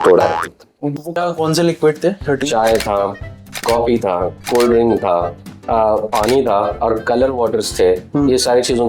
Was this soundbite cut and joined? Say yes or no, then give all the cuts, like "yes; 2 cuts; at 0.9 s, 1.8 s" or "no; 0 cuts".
yes; 1 cut; at 0.9 s